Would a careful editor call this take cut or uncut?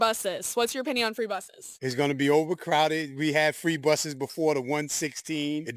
uncut